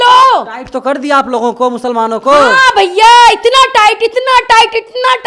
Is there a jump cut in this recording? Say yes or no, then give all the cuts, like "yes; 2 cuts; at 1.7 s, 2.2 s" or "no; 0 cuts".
no; 0 cuts